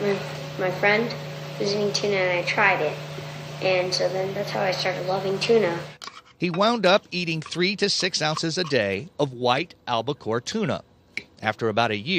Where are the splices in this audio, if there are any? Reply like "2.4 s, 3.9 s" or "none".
8.4 s